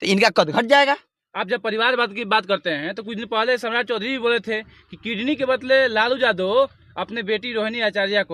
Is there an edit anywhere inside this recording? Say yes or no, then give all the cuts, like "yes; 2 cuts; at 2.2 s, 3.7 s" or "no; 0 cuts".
no; 0 cuts